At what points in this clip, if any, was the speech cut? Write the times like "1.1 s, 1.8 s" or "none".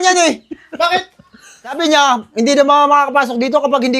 1.8 s